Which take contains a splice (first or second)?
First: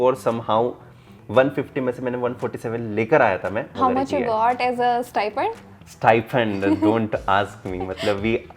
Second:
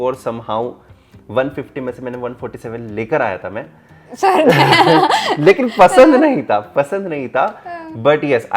first